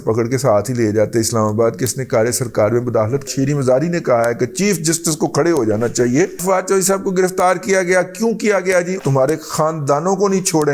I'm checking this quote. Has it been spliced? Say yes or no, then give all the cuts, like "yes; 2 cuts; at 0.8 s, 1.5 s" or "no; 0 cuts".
yes; 3 cuts; at 3.3 s, 6.4 s, 9.0 s